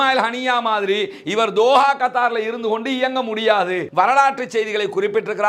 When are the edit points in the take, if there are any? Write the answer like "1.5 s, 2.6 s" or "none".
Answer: 3.8 s

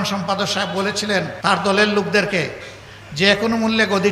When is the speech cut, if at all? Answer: 1.3 s

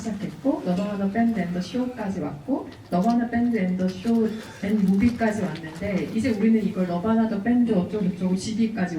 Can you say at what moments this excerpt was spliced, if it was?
none

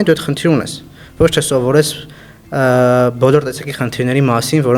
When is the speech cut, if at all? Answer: none

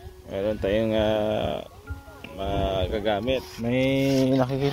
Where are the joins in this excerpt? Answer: 3.5 s

